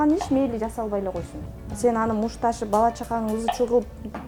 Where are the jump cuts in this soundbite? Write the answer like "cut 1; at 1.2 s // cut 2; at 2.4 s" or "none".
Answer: none